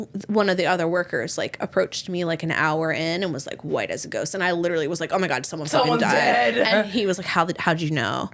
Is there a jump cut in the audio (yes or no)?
no